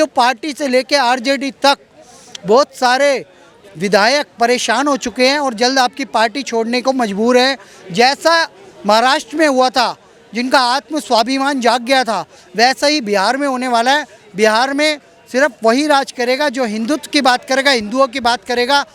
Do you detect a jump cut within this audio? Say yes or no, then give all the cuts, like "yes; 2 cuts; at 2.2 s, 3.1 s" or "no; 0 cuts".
no; 0 cuts